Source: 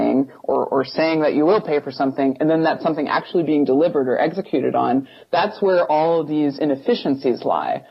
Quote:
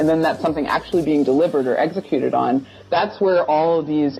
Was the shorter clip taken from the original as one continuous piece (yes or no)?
yes